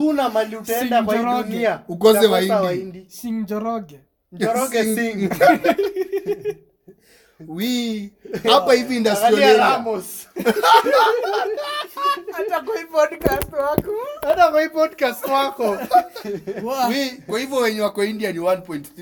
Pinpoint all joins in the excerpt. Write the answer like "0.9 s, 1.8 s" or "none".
none